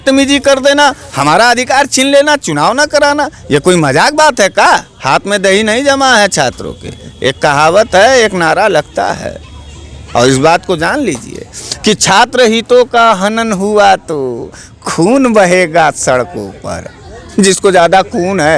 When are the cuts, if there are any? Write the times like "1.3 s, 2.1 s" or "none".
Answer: none